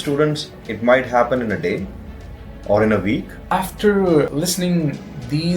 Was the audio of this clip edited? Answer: yes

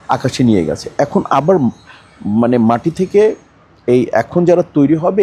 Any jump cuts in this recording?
no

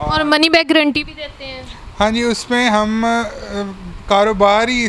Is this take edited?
no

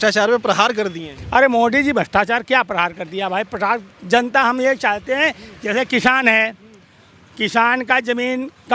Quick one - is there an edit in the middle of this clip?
no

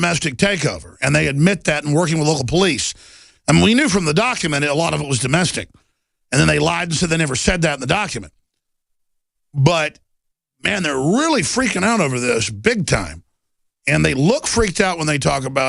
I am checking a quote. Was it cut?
yes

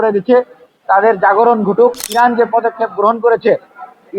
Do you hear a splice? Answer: yes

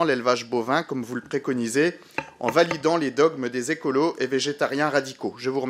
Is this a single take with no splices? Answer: yes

